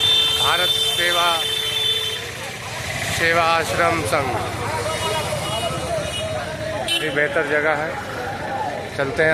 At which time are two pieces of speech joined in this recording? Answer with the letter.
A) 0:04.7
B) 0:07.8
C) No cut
C